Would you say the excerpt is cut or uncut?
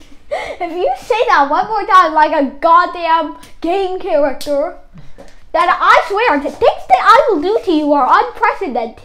uncut